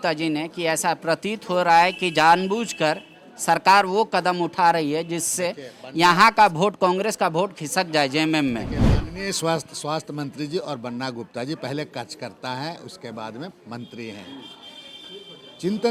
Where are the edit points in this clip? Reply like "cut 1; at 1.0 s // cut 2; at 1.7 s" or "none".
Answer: none